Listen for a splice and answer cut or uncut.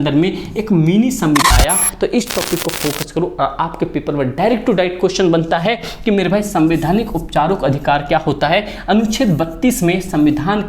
cut